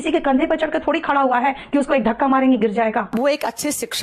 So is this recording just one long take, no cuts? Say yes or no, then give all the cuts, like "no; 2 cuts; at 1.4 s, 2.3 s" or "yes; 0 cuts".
no; 1 cut; at 3.1 s